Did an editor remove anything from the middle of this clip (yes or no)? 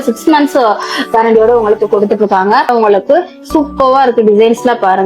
yes